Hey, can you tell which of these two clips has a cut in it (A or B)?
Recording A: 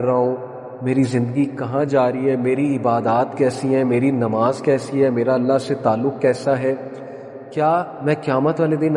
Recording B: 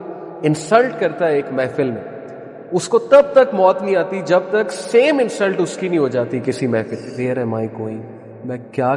B